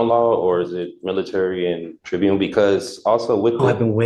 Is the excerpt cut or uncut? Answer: cut